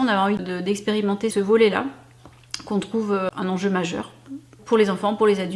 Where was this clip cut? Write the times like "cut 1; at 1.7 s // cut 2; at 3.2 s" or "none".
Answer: cut 1; at 0.9 s // cut 2; at 3.3 s // cut 3; at 4.6 s